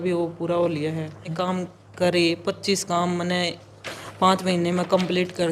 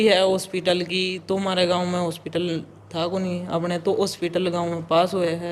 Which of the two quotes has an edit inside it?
first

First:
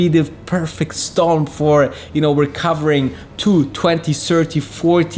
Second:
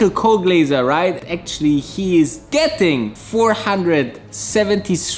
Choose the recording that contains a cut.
second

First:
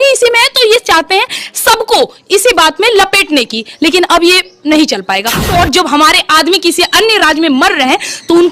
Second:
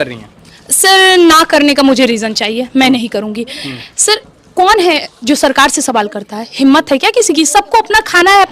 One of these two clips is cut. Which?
first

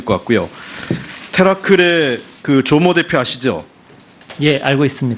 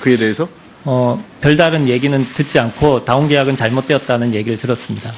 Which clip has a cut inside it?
second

